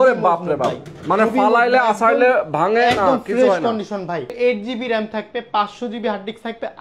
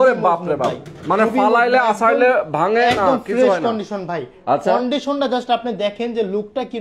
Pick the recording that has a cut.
first; 1 cut; at 4.3 s

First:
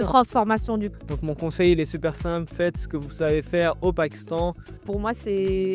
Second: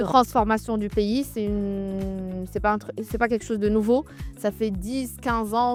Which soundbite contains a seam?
first; 2 cuts; at 0.9 s, 4.8 s

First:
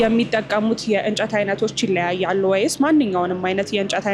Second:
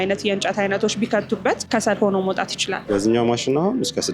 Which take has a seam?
second; 2 cuts; at 1.6 s, 2.9 s

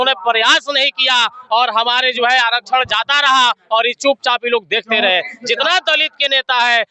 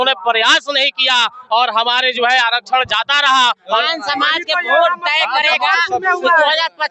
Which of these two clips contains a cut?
second; 1 cut; at 3.8 s

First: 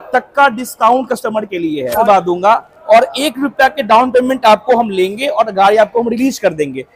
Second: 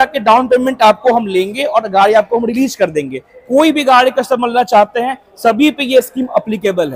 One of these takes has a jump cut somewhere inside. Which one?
first; 1 cut; at 2.0 s

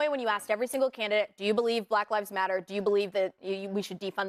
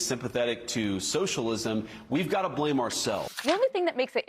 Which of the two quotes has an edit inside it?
second; 1 cut; at 3.3 s

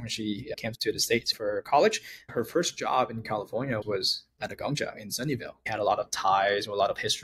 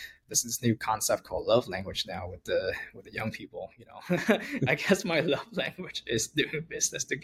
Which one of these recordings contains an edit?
first; 4 cuts; at 1.1 s, 2.2 s, 3.8 s, 5.7 s

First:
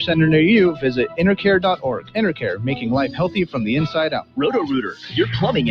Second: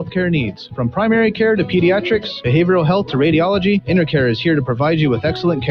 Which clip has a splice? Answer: first; 1 cut; at 4.2 s

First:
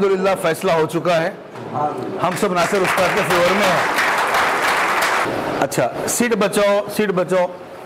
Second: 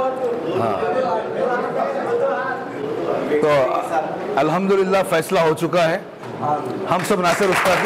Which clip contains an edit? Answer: first; 1 cut; at 5.2 s

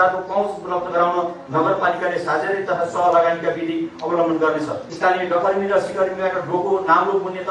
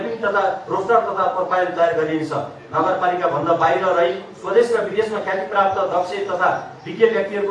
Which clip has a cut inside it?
first; 1 cut; at 4.8 s

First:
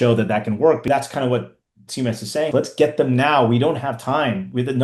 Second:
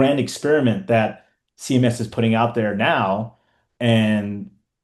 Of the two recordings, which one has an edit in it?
first; 2 cuts; at 0.9 s, 2.5 s

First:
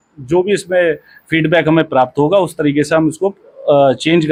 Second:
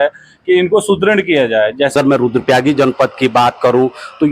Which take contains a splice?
second; 1 cut; at 1.9 s

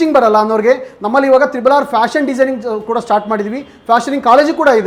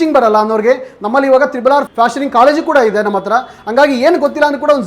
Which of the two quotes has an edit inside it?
second; 1 cut; at 1.9 s

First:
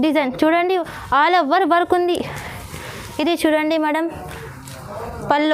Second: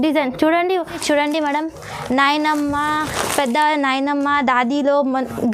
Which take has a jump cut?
second; 1 cut; at 1.0 s

